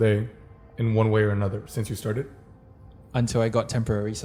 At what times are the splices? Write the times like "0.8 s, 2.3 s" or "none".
none